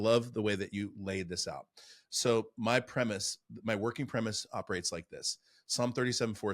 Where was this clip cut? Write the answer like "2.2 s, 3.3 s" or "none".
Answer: none